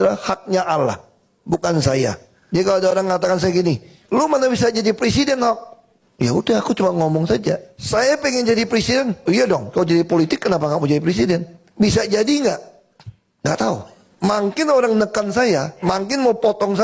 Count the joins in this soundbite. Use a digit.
1